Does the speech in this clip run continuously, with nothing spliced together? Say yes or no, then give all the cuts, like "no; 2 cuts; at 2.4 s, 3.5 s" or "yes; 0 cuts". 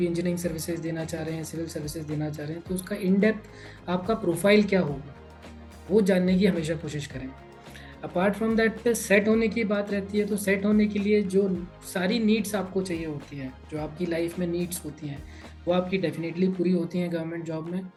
yes; 0 cuts